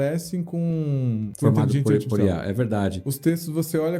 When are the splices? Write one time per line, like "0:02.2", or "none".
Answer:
0:01.3
0:03.1